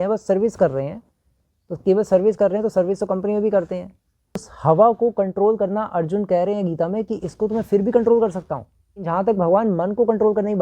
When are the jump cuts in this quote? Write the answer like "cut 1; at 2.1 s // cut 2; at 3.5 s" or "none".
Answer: cut 1; at 4.5 s // cut 2; at 9.1 s